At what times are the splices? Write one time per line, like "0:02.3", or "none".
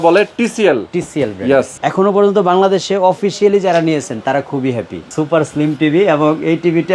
0:01.8
0:05.1